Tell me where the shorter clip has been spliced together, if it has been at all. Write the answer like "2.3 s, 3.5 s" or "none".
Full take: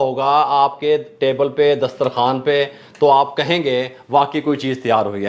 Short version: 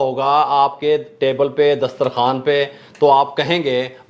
none